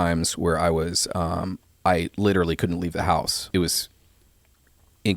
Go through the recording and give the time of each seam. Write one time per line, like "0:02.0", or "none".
0:03.4